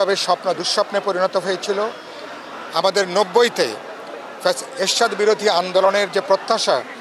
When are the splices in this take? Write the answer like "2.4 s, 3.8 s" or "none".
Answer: none

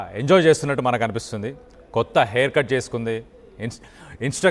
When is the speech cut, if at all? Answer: none

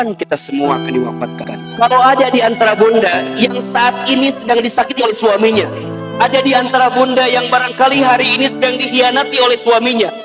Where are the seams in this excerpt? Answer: 1.3 s

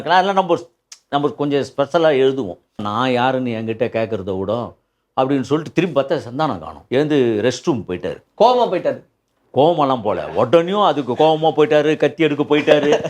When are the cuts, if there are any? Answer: 2.8 s, 6.7 s

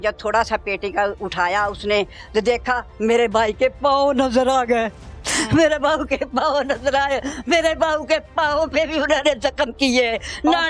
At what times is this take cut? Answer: none

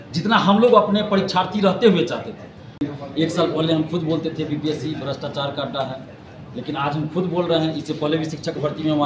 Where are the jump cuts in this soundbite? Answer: 2.8 s

